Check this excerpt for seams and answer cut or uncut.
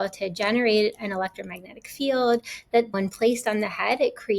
cut